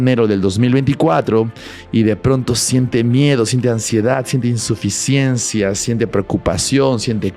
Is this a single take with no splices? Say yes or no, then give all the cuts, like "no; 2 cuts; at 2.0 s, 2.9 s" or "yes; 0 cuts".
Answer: yes; 0 cuts